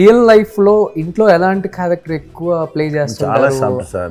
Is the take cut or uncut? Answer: uncut